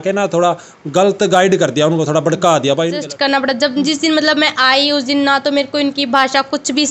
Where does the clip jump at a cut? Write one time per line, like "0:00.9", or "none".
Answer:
0:03.0